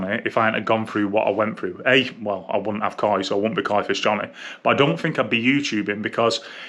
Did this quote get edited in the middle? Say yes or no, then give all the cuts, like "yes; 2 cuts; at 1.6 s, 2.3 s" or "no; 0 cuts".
no; 0 cuts